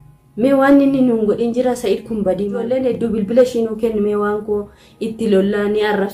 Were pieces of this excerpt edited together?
yes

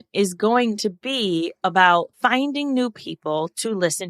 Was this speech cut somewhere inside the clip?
yes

